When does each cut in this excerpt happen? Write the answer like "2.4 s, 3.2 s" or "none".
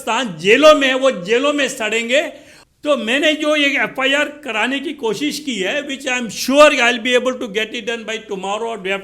2.6 s